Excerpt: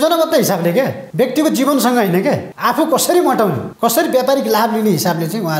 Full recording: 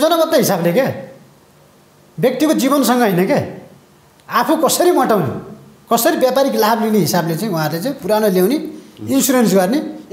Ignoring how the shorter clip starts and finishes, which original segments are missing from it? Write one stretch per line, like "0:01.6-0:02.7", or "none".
0:01.0-0:02.1
0:03.6-0:04.2
0:05.4-0:05.7